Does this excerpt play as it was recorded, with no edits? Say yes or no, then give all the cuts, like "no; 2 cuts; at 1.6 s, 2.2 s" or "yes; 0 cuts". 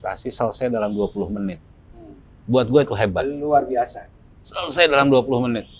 yes; 0 cuts